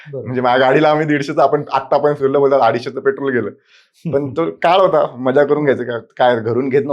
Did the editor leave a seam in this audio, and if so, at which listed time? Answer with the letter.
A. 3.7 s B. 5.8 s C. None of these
C